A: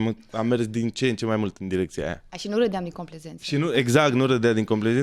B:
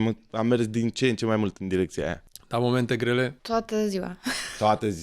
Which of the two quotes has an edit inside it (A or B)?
B